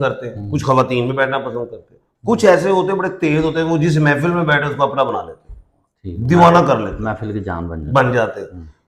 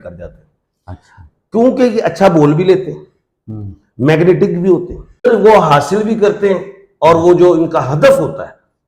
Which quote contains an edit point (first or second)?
second